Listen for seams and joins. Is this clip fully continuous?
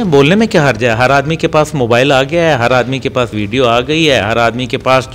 yes; 0 cuts

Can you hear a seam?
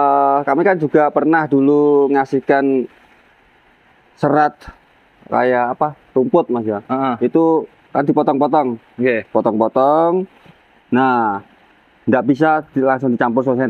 no; 0 cuts

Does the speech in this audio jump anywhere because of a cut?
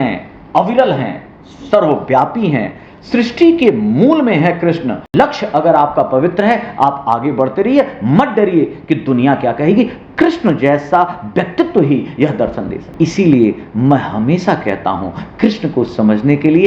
yes; 2 cuts; at 5.0 s, 12.9 s

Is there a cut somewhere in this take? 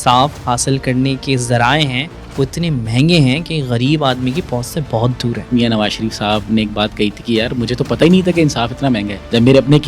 yes; 1 cut; at 5.5 s

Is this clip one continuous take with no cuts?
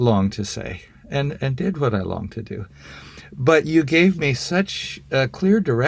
no; 1 cut; at 2.6 s

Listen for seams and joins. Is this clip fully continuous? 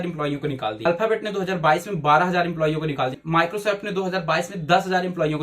no; 2 cuts; at 0.8 s, 3.1 s

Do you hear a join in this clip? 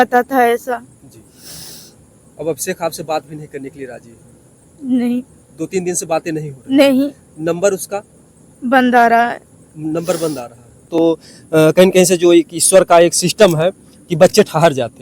yes; 1 cut; at 10.9 s

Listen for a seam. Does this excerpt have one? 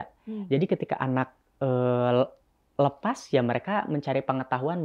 no; 0 cuts

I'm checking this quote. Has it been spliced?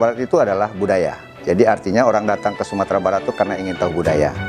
no; 0 cuts

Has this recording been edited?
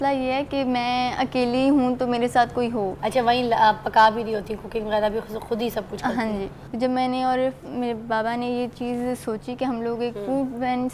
yes; 2 cuts; at 3.0 s, 6.6 s

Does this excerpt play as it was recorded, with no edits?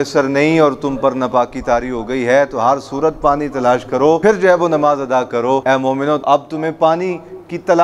no; 2 cuts; at 4.2 s, 5.9 s

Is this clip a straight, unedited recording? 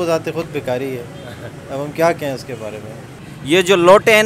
no; 1 cut; at 3.3 s

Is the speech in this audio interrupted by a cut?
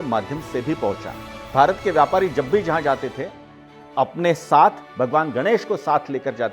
yes; 2 cuts; at 1.5 s, 4.9 s

